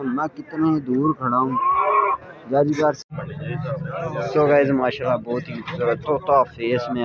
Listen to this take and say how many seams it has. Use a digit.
1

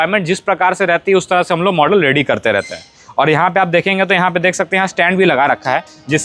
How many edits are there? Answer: 0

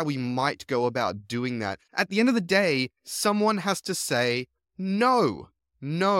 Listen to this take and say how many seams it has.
1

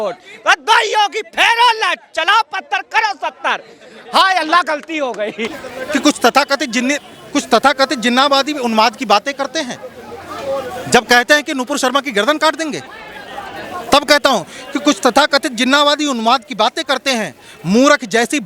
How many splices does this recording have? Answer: 1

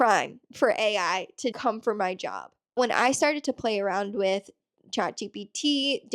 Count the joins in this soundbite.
1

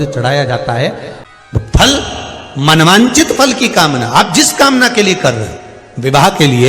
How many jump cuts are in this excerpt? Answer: 1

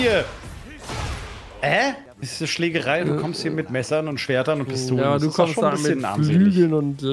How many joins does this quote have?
1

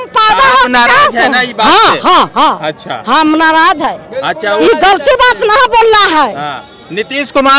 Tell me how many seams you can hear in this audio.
0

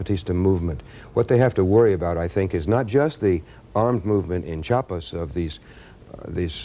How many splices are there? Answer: 0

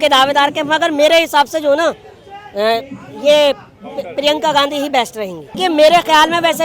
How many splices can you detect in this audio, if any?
1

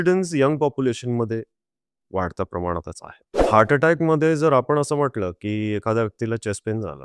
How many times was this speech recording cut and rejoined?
1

